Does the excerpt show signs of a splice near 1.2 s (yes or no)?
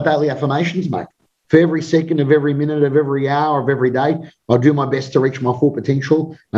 yes